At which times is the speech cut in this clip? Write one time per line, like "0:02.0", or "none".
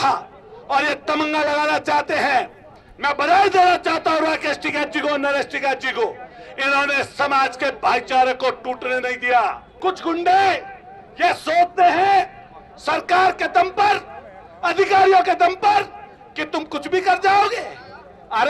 0:09.7